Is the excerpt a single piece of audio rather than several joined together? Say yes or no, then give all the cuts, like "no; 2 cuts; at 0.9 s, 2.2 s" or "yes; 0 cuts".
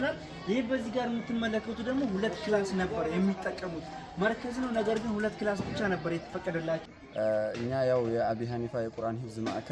no; 1 cut; at 7.0 s